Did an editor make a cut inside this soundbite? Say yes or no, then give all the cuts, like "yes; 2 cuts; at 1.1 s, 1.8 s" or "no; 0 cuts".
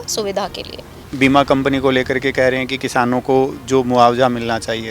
yes; 1 cut; at 1.0 s